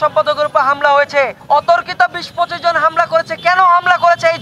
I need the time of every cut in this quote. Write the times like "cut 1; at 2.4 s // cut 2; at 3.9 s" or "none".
cut 1; at 1.4 s